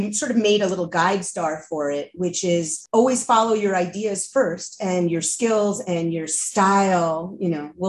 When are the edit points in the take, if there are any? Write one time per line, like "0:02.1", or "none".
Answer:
0:02.8